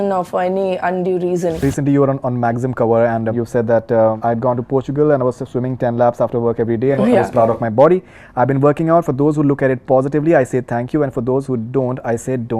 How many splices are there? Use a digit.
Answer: 3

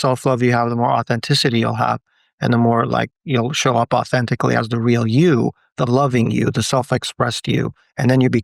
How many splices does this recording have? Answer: 0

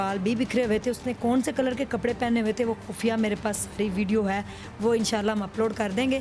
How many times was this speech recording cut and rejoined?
0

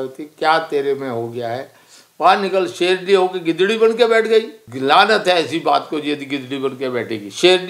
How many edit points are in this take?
1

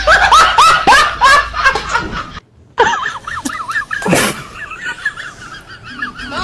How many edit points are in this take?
0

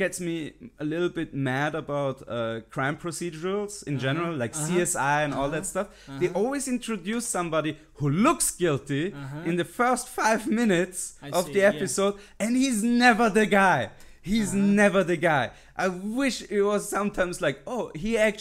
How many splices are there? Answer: 0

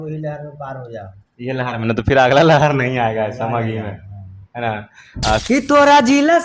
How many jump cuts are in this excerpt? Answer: 1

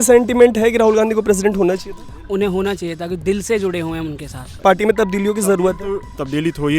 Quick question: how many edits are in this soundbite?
1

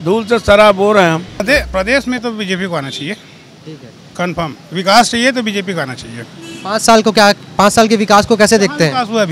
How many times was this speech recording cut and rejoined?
1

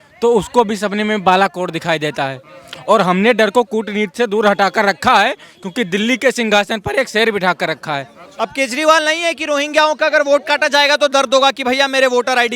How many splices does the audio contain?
1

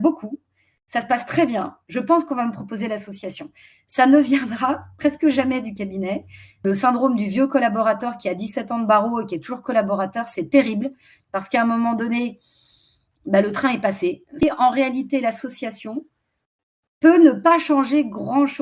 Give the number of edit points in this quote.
2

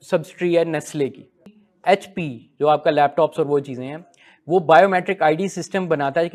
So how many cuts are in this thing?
1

